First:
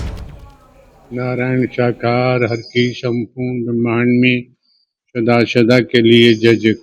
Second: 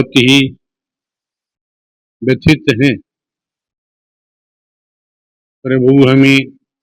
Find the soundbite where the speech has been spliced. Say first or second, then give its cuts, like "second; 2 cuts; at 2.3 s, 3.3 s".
first; 1 cut; at 1.1 s